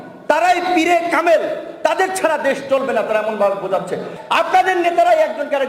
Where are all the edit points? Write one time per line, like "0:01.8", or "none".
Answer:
0:04.1